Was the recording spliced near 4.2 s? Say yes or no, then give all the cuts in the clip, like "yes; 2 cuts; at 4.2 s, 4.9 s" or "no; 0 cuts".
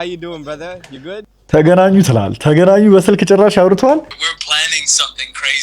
yes; 1 cut; at 4.2 s